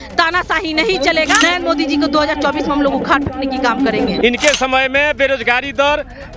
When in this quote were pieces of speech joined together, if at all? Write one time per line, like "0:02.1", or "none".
0:01.4
0:04.2